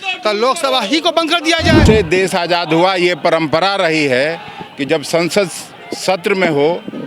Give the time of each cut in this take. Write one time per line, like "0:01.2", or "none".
0:01.8